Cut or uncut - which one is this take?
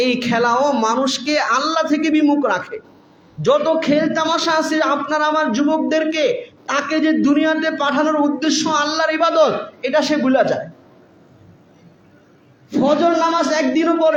uncut